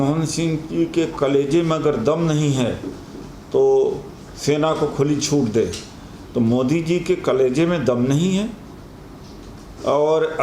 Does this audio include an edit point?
no; 0 cuts

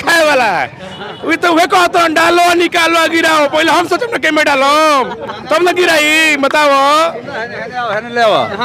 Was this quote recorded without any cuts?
yes; 0 cuts

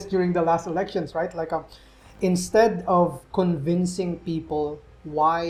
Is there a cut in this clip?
no; 0 cuts

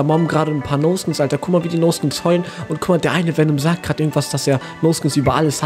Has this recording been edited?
no; 0 cuts

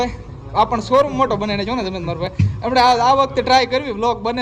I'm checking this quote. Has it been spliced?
no; 0 cuts

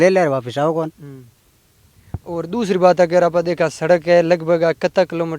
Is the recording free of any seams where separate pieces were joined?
yes; 0 cuts

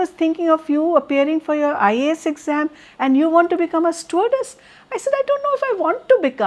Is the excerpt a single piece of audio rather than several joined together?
yes; 0 cuts

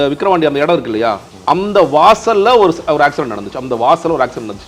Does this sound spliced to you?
no; 0 cuts

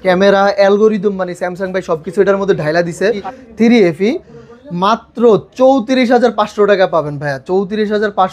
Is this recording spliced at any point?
yes; 1 cut; at 3.4 s

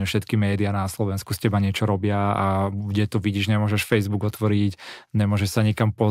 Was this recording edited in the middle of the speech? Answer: no; 0 cuts

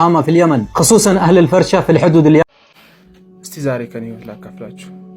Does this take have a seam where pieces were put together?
yes; 1 cut; at 2.4 s

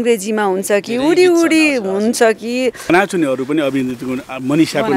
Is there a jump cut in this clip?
yes; 1 cut; at 2.9 s

